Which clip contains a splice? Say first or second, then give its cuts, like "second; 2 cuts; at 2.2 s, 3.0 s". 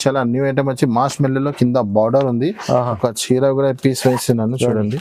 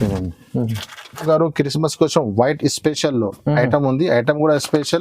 second; 1 cut; at 1.2 s